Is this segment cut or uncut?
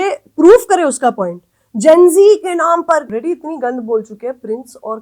cut